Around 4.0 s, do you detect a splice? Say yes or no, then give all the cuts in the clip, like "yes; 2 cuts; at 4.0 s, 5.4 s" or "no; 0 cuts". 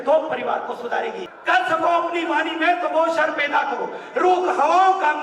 no; 1 cut; at 1.3 s